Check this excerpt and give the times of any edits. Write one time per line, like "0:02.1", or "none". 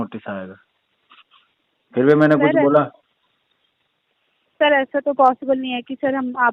none